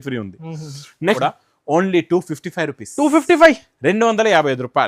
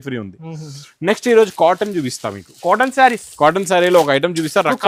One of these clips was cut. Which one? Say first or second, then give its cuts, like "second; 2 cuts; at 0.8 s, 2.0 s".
first; 1 cut; at 1.2 s